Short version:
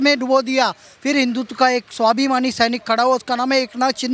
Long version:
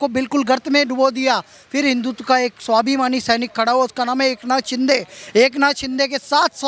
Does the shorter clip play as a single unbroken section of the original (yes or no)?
yes